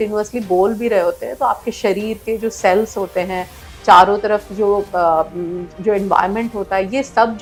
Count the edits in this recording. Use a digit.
0